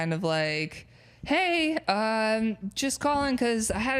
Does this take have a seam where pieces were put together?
no; 0 cuts

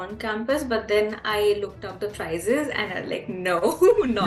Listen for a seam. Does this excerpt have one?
no; 0 cuts

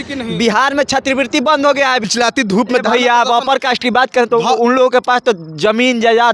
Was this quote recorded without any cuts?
no; 1 cut; at 2.0 s

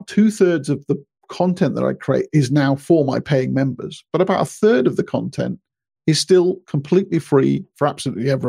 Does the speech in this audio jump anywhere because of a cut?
no; 0 cuts

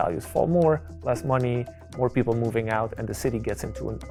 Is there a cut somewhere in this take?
no; 0 cuts

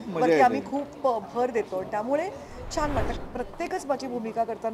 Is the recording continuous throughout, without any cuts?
no; 1 cut; at 3.1 s

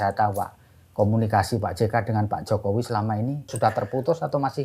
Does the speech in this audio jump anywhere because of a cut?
yes; 1 cut; at 3.5 s

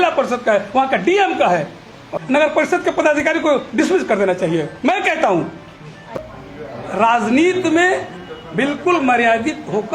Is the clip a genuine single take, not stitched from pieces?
no; 2 cuts; at 2.1 s, 6.3 s

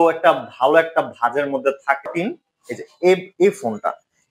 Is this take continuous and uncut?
no; 1 cut; at 2.1 s

